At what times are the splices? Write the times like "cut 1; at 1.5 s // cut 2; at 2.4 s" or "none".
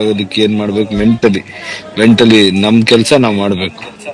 none